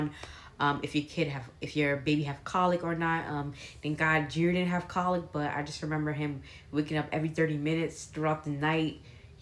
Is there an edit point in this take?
no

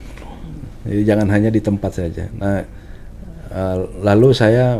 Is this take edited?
no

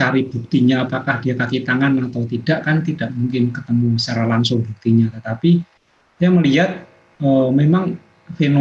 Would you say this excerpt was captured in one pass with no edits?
yes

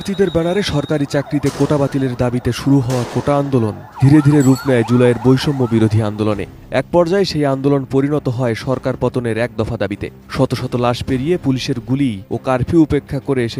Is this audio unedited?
yes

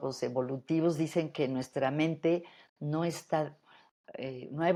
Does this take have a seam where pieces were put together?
no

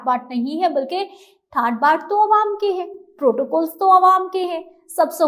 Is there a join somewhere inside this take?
no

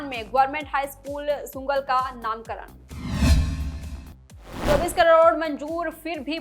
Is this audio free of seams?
no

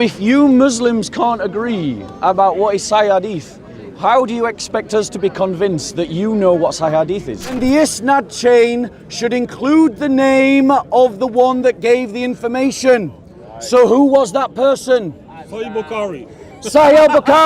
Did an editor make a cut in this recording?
yes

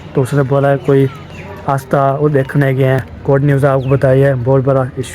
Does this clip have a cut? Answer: yes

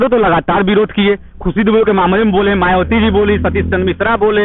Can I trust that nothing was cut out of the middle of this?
yes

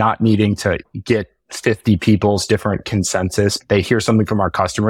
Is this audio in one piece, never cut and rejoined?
no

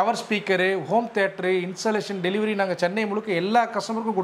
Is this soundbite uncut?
yes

